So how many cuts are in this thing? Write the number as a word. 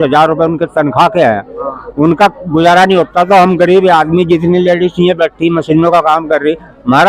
zero